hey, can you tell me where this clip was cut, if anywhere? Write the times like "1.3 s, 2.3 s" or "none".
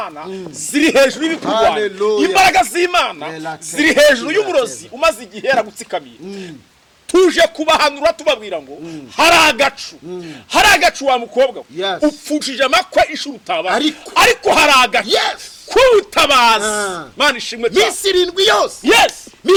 none